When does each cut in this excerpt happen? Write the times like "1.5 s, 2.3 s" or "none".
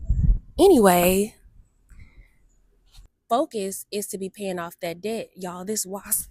3.1 s